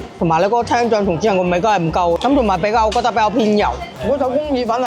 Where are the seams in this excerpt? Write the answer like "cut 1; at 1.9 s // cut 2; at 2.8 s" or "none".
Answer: cut 1; at 3.9 s